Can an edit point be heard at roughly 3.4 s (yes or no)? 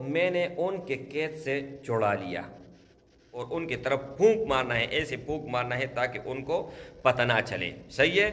yes